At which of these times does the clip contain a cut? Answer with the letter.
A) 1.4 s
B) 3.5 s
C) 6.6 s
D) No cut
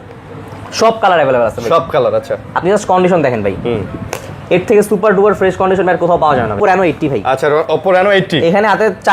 C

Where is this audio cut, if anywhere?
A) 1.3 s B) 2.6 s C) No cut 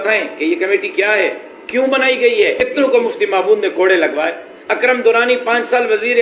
B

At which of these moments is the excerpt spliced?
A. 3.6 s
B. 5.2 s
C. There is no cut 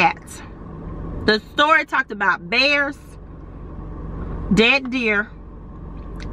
C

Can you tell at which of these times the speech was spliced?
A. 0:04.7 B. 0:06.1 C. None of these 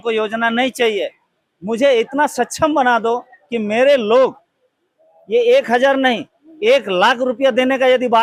C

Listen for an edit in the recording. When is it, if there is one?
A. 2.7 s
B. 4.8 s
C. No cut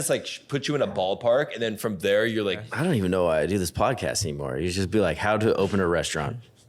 A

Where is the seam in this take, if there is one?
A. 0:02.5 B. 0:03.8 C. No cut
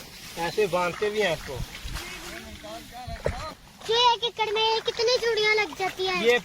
B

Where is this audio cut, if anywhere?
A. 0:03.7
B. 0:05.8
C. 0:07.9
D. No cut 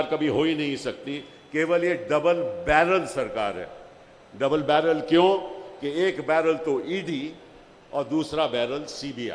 D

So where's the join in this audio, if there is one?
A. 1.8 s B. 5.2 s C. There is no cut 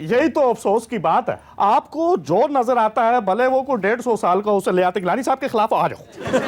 C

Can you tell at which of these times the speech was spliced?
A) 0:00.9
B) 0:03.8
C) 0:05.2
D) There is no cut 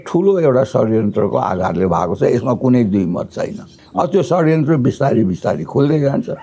B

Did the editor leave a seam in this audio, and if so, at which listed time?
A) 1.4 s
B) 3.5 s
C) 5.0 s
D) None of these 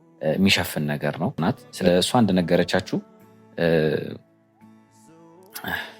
A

